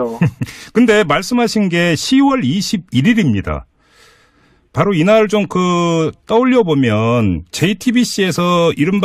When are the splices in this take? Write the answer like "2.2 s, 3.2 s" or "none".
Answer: 7.5 s